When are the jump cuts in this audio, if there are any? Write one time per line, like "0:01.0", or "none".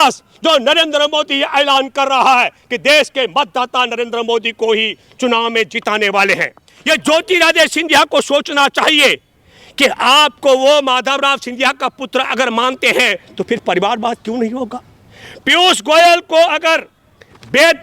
0:06.7